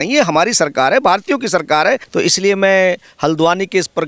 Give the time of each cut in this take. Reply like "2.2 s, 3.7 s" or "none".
2.1 s